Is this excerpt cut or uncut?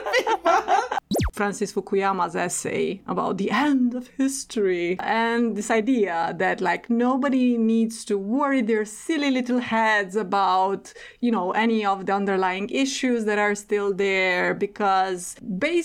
cut